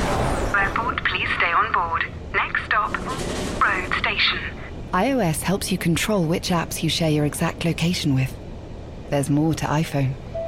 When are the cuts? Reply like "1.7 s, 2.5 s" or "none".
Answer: none